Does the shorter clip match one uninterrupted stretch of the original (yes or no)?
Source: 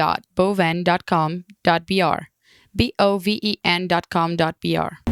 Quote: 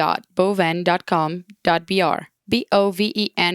no